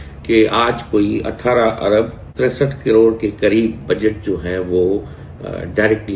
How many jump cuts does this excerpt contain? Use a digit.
1